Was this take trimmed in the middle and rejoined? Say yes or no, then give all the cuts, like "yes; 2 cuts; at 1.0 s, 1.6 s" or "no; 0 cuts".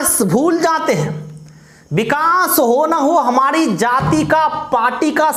no; 0 cuts